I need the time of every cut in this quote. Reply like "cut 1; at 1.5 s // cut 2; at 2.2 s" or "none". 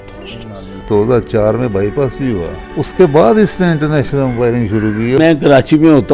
cut 1; at 0.8 s // cut 2; at 2.6 s // cut 3; at 5.2 s